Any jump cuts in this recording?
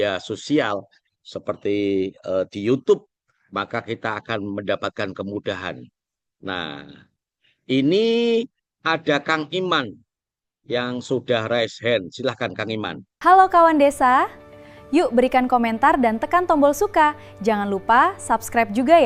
no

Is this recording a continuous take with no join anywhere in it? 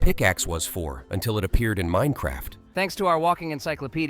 no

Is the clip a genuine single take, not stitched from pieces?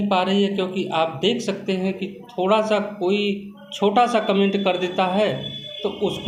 yes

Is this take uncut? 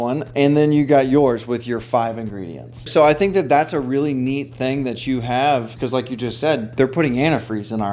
no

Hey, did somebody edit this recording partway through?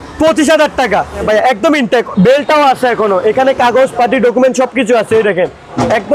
yes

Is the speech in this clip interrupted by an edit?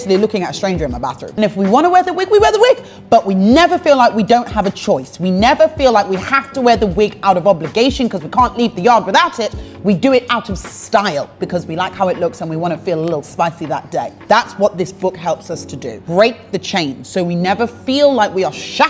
no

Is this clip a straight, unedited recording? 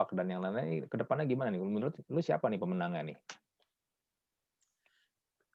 yes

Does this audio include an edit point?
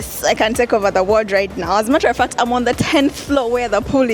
no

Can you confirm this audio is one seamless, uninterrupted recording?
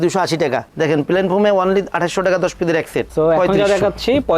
no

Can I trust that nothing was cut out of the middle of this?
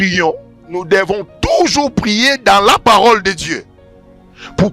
yes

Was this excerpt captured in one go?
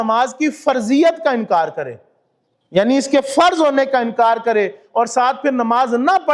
yes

